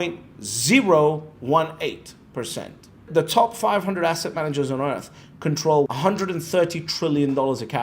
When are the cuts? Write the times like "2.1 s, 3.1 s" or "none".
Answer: 3.1 s, 5.9 s

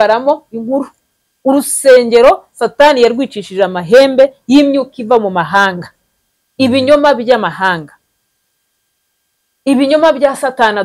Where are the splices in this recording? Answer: none

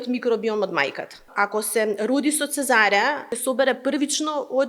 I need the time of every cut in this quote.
1.2 s, 3.3 s

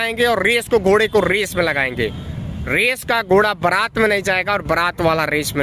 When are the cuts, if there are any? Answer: none

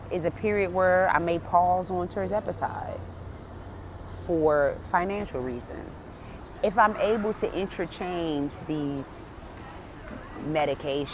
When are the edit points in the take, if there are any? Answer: 6.3 s

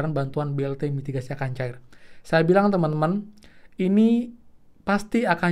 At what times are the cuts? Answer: none

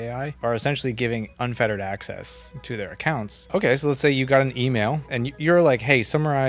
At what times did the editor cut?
3.3 s

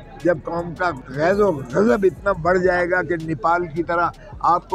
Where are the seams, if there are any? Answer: 1.1 s

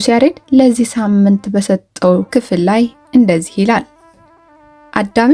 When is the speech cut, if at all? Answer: 2.3 s

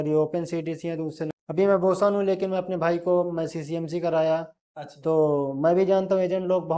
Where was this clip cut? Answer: 1.4 s

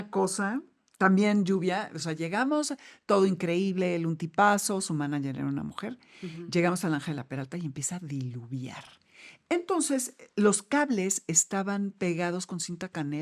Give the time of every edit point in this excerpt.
none

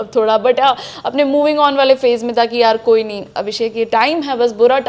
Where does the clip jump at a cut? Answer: none

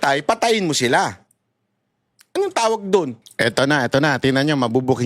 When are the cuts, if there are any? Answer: 3.2 s

